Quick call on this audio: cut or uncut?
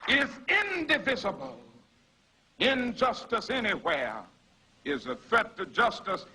uncut